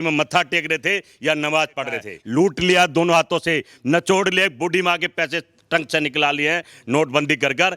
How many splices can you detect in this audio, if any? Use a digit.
1